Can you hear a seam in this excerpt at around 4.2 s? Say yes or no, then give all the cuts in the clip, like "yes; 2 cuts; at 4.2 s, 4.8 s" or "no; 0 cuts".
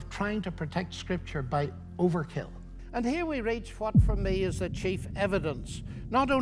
no; 1 cut; at 2.8 s